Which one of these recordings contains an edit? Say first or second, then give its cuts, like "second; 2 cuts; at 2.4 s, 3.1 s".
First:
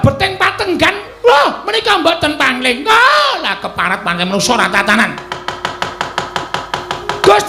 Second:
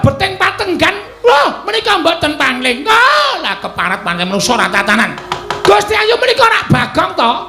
second; 1 cut; at 5.3 s